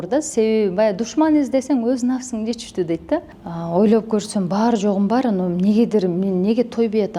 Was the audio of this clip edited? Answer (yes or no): yes